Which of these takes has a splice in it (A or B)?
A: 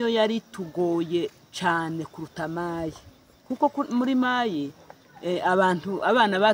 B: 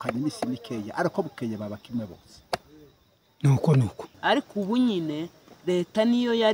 B